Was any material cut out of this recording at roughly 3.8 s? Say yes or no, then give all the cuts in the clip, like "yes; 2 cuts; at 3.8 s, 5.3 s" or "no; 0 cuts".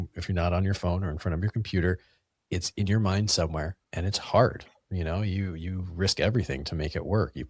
yes; 1 cut; at 3.8 s